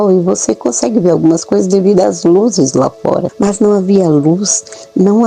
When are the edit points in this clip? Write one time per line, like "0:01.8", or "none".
0:03.3